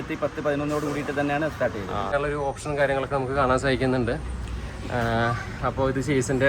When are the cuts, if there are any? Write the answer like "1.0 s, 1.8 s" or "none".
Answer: 2.1 s